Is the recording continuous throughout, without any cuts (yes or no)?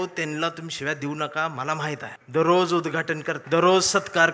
no